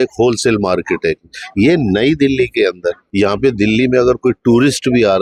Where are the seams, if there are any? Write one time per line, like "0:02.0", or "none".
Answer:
0:03.0